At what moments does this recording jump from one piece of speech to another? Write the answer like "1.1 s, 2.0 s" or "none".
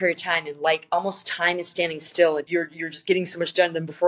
2.5 s